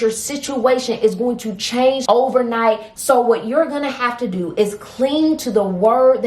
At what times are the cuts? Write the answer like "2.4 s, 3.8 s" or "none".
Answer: 2.0 s, 2.9 s